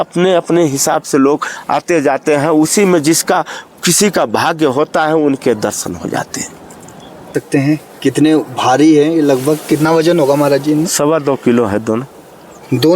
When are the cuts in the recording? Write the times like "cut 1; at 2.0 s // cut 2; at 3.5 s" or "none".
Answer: cut 1; at 7.3 s